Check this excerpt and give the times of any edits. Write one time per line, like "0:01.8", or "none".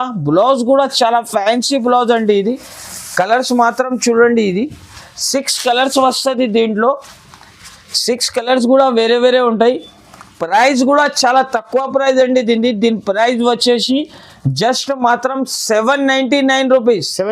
none